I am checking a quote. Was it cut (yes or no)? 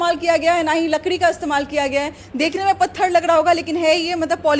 yes